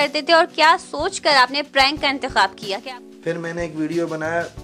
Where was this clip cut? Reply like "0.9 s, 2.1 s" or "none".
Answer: 2.6 s